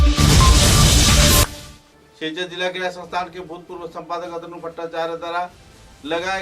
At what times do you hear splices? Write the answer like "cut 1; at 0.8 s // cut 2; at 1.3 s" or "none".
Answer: cut 1; at 1.4 s